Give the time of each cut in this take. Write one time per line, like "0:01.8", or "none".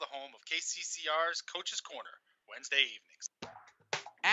0:03.2